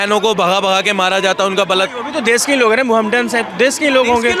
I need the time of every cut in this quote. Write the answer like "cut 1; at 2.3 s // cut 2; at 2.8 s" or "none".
none